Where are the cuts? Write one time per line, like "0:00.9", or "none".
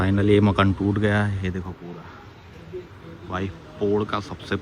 none